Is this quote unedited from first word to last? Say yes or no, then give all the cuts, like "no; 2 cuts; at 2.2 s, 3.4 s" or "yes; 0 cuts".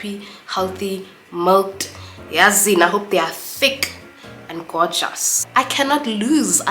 no; 1 cut; at 5.4 s